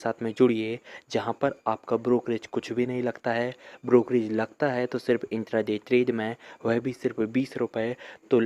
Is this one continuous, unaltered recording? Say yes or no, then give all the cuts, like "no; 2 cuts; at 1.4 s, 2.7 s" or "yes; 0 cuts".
yes; 0 cuts